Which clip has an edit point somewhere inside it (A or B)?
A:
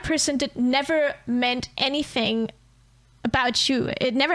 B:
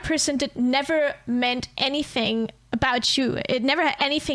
B